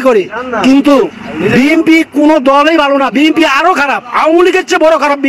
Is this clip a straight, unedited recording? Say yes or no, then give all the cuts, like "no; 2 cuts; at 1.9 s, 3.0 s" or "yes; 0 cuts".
yes; 0 cuts